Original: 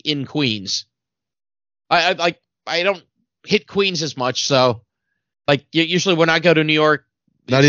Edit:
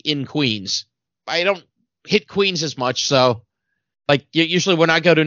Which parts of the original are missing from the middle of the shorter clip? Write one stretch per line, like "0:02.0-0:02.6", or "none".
0:01.1-0:02.5